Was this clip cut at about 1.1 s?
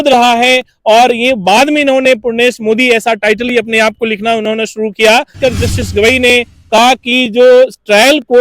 no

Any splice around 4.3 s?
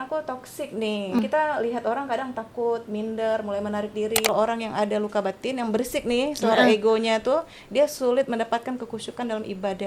yes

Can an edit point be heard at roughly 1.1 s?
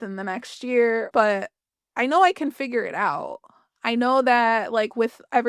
yes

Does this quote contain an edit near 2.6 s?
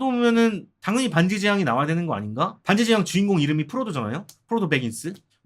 yes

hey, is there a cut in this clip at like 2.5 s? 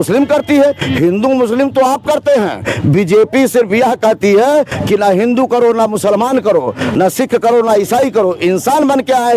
no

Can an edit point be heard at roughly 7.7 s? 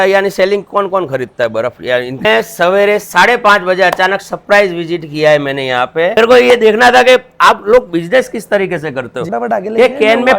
no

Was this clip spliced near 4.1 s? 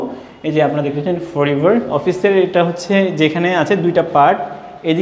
no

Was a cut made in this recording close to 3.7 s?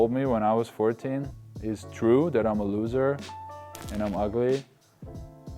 no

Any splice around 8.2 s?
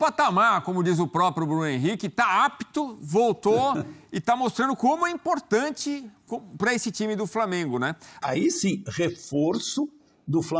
yes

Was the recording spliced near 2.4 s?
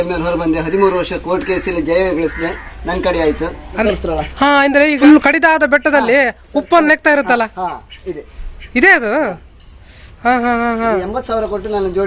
no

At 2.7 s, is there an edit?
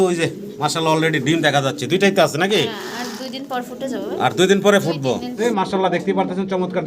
no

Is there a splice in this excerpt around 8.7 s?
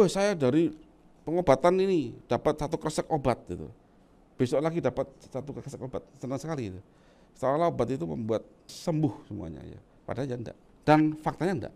yes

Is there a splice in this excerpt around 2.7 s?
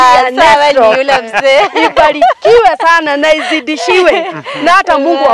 no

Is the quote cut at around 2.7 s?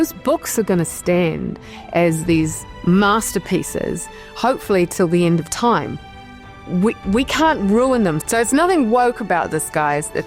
yes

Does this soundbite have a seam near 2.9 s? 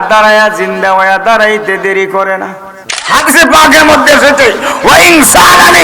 yes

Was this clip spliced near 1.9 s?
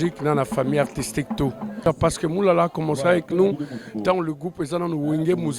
yes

